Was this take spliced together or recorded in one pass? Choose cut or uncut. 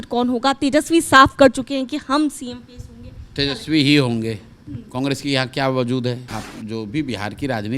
cut